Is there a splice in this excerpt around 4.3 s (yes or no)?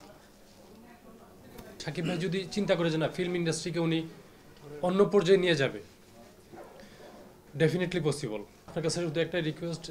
no